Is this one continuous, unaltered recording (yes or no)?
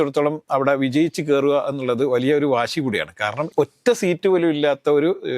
no